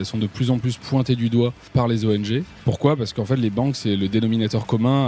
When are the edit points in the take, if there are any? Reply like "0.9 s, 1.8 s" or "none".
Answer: 1.7 s, 2.5 s